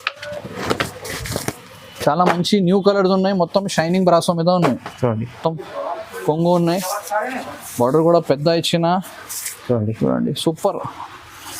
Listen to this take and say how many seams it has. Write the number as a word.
one